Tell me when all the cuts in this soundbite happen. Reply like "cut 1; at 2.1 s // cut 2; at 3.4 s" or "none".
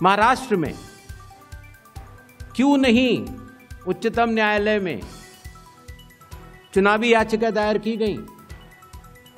cut 1; at 0.9 s // cut 2; at 2.6 s